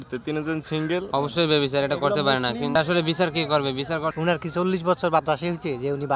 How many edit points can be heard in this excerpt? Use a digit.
2